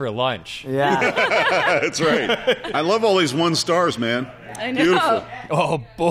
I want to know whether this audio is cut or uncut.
cut